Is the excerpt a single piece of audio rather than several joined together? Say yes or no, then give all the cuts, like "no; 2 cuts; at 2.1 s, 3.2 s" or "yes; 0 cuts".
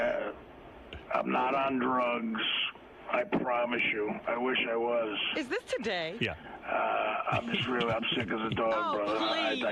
yes; 0 cuts